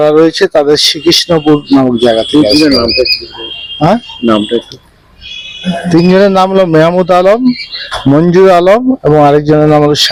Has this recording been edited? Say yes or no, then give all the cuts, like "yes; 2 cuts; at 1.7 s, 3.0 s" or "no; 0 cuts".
no; 0 cuts